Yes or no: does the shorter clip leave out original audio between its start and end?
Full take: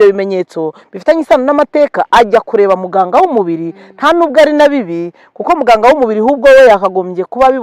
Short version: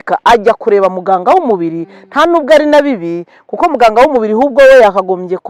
no